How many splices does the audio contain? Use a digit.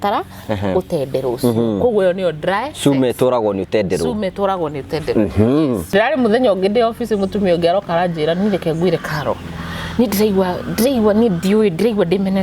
1